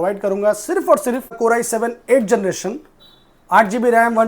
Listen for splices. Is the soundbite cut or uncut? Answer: cut